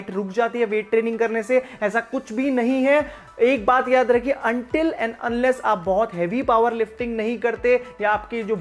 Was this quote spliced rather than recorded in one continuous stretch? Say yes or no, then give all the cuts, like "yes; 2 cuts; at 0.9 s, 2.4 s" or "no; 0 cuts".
no; 0 cuts